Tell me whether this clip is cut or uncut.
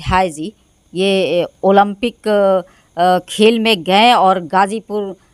uncut